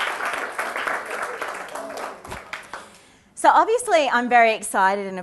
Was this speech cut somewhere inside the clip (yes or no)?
yes